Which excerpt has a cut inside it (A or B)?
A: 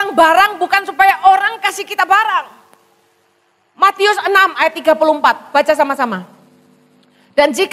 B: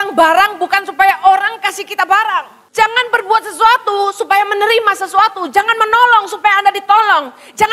B